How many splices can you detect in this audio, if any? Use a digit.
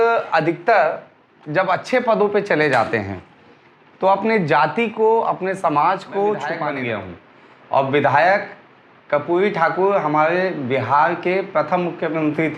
1